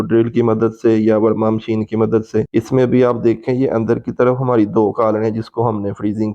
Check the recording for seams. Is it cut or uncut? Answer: cut